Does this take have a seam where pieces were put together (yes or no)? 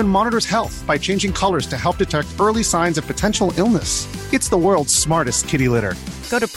no